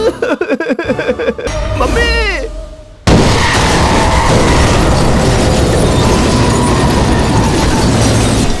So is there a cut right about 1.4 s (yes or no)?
yes